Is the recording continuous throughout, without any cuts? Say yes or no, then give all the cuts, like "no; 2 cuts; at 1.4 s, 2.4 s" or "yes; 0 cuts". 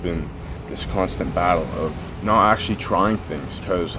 yes; 0 cuts